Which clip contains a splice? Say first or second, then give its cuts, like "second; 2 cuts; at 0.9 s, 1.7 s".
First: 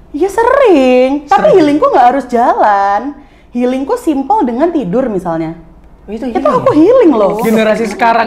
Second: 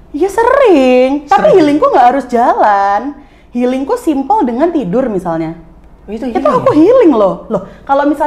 first; 1 cut; at 7.4 s